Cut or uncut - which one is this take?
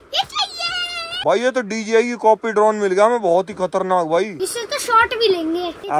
uncut